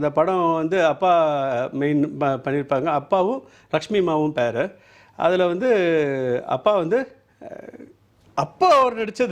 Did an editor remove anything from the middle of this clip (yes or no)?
no